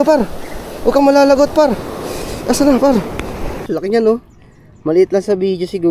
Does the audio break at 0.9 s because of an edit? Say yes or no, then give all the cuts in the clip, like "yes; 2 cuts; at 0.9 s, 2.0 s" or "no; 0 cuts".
no; 1 cut; at 3.6 s